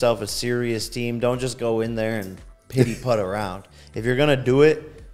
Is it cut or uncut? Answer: uncut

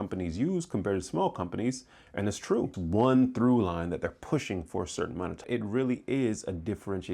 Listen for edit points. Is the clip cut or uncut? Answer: cut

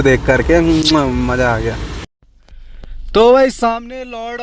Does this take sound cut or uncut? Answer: cut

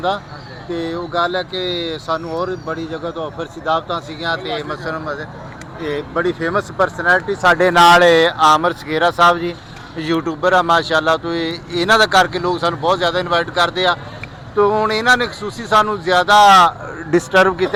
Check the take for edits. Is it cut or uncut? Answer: uncut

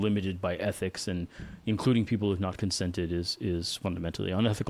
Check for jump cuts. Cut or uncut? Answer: uncut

